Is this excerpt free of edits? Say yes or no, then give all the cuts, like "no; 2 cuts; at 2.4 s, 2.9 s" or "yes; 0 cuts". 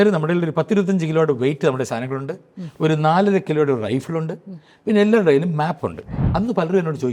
no; 1 cut; at 6.1 s